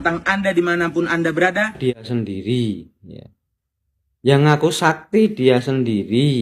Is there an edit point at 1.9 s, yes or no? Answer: yes